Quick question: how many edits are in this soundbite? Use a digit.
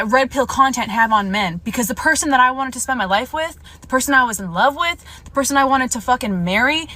0